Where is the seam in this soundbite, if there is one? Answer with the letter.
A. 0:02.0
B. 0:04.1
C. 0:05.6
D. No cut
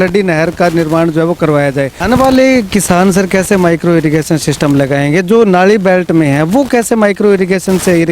A